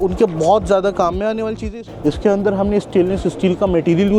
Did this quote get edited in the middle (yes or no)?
yes